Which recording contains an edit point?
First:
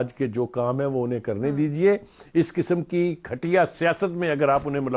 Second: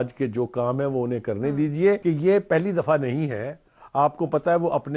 second; 1 cut; at 2.0 s

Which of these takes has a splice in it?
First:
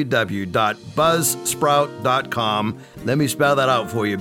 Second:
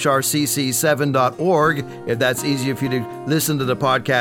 first; 1 cut; at 2.9 s

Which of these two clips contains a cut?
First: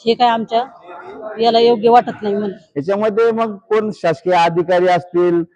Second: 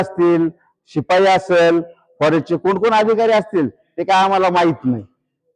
first; 1 cut; at 2.6 s

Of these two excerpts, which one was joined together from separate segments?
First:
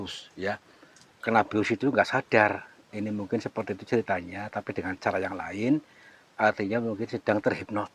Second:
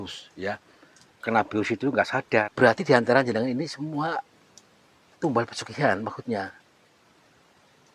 second; 1 cut; at 2.5 s

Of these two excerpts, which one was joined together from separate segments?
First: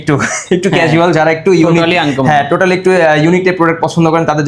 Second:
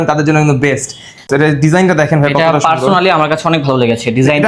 second; 1 cut; at 1.3 s

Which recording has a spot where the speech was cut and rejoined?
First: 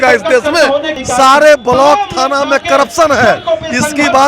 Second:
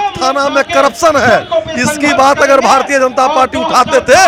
first; 1 cut; at 1.0 s

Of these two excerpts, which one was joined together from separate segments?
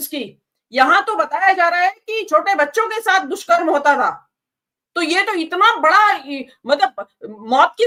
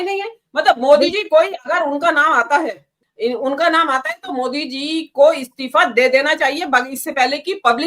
second; 1 cut; at 3.0 s

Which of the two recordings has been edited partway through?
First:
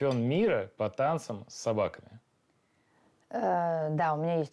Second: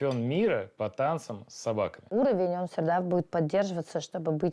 second; 1 cut; at 2.1 s

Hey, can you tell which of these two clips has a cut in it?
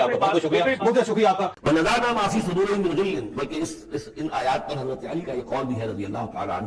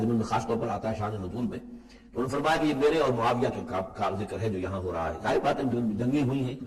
first; 1 cut; at 1.5 s

